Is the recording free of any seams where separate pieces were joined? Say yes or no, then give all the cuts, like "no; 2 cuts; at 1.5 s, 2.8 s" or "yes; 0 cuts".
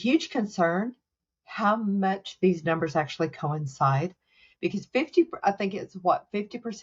yes; 0 cuts